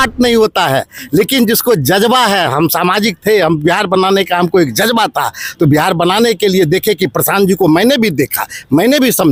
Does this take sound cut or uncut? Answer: uncut